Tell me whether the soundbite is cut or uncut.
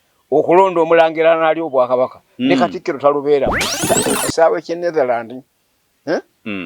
cut